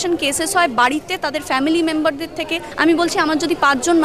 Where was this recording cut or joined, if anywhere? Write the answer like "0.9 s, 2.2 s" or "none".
2.6 s